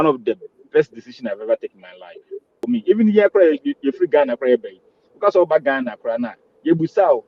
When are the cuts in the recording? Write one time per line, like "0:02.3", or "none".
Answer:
0:02.6